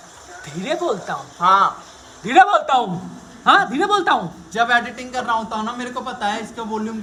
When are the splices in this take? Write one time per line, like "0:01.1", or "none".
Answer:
none